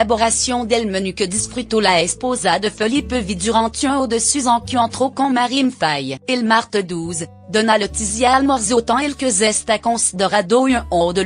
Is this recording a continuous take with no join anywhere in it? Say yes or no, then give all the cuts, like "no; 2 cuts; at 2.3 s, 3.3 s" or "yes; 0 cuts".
no; 1 cut; at 4.9 s